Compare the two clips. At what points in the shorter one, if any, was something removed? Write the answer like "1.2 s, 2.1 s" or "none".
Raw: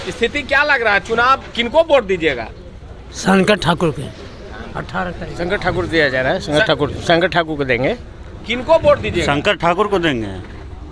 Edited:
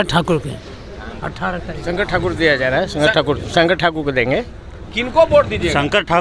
none